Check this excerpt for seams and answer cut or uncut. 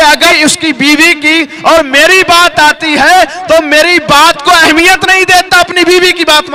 uncut